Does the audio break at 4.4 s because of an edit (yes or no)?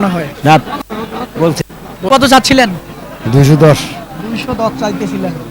no